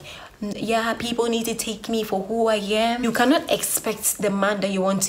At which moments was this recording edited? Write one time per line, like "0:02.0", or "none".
0:03.0